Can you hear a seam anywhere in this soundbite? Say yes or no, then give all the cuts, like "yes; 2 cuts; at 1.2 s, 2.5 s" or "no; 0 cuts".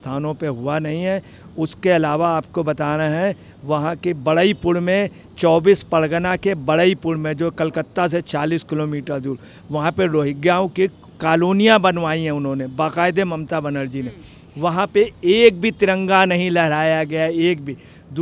no; 0 cuts